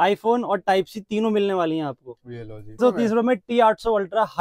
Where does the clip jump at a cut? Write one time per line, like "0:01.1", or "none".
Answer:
0:02.8